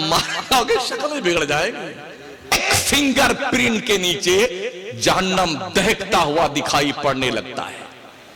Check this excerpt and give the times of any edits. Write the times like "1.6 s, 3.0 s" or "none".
2.5 s